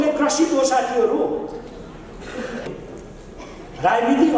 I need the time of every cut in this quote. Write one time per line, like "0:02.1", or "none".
0:02.7

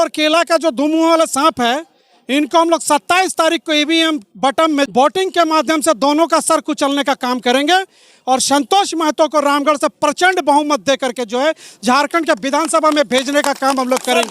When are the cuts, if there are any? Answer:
0:04.9

